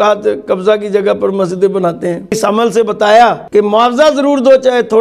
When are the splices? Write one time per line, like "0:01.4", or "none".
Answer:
0:02.4
0:03.4